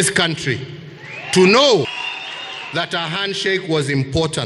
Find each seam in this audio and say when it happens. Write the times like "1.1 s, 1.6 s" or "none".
1.9 s